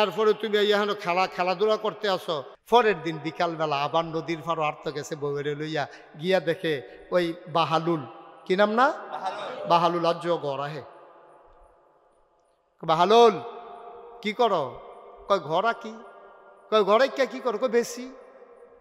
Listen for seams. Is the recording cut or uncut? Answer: cut